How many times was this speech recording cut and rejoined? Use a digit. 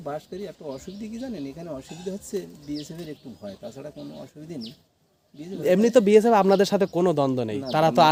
0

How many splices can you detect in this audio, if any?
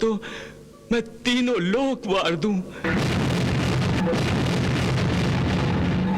2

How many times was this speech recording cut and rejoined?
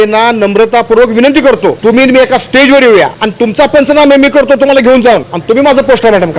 3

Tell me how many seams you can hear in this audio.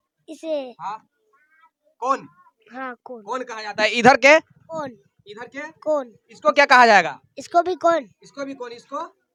0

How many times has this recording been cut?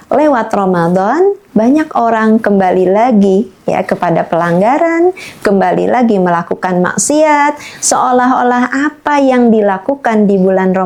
0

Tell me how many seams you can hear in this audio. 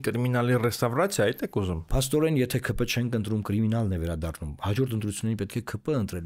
1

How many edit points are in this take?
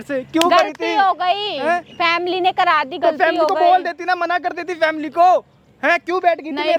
0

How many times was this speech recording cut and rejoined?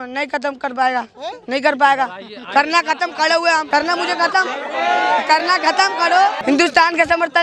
2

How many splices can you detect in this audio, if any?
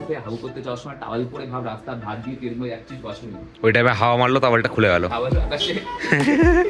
0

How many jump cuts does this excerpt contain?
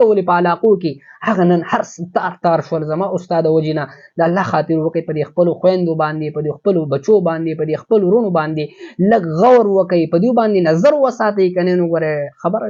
0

